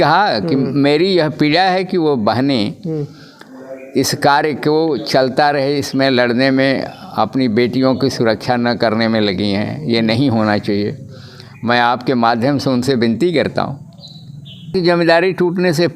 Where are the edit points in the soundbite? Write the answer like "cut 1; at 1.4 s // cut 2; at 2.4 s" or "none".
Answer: cut 1; at 14.7 s